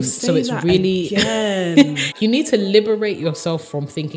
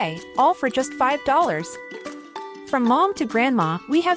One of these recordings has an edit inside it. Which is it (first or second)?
first